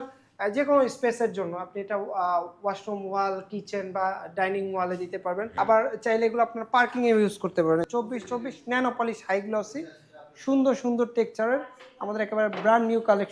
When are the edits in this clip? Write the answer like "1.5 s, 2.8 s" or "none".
5.5 s, 7.9 s

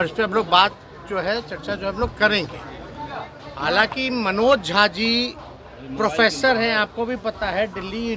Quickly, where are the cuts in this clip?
none

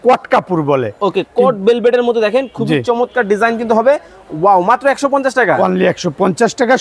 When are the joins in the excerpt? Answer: none

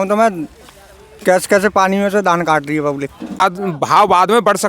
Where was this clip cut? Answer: 3.4 s

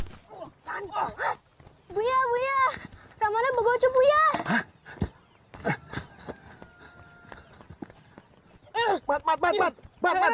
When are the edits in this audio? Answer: 8.5 s

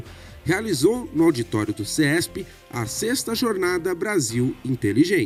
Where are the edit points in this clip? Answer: none

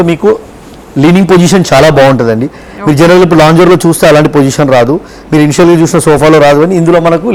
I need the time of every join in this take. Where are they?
none

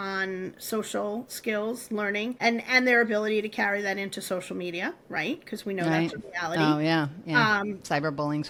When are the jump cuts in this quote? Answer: none

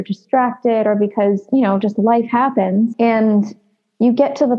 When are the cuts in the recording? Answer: 1.4 s, 2.9 s

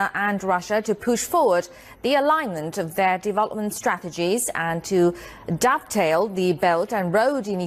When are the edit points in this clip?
2.3 s

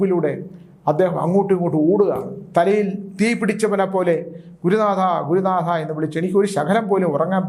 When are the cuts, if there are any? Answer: none

